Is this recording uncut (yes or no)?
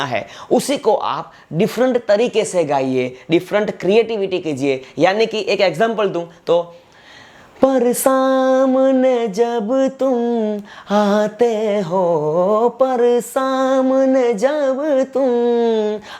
yes